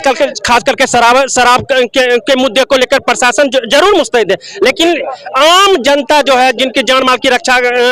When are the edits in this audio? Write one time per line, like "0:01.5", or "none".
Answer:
none

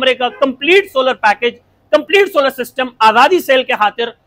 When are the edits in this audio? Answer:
none

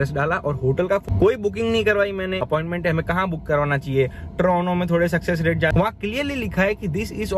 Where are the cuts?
0:01.0
0:02.4
0:05.7

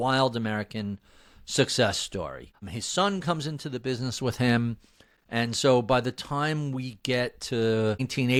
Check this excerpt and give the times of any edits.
none

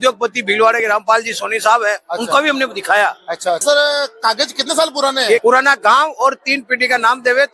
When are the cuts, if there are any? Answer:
0:03.6
0:05.4

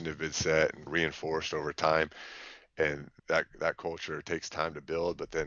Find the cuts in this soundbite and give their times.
0:00.9
0:03.1

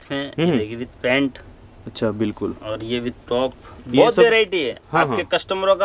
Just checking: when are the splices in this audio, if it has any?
none

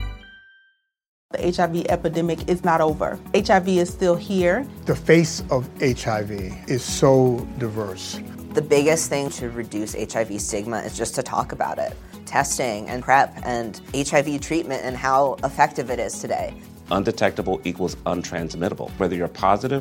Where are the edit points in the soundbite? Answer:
0:01.2

